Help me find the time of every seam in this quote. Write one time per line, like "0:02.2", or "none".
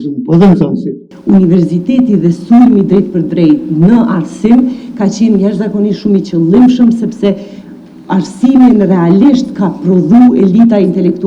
0:01.1